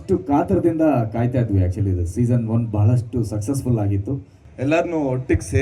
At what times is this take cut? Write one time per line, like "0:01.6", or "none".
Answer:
0:04.3